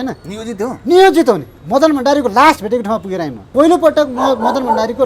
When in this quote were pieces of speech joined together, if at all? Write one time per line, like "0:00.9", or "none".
0:01.5
0:03.5